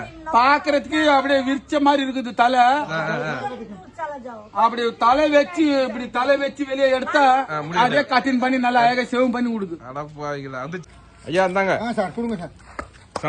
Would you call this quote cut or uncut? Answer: cut